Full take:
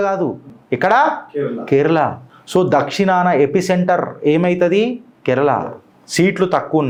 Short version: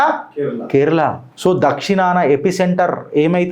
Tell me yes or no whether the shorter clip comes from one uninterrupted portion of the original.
no